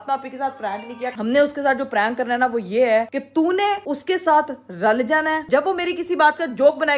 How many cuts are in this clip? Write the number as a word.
two